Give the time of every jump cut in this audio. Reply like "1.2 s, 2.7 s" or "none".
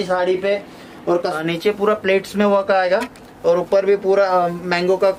1.4 s